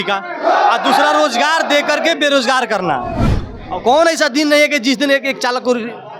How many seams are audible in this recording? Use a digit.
1